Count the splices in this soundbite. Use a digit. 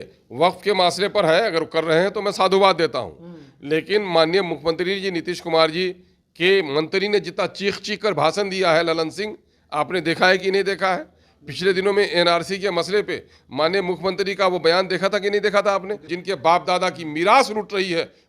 1